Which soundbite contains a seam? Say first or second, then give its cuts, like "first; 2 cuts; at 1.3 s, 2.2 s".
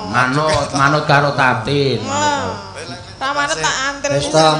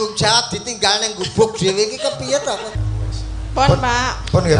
second; 1 cut; at 2.8 s